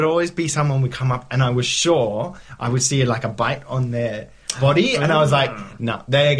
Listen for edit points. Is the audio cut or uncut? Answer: uncut